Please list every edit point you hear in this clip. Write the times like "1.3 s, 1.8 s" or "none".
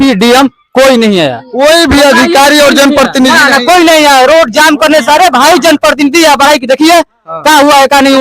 none